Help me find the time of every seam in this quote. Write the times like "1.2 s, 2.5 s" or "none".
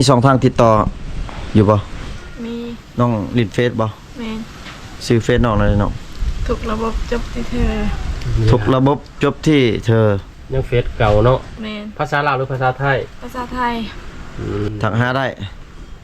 14.7 s